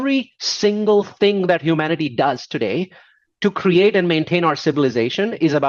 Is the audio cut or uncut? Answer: uncut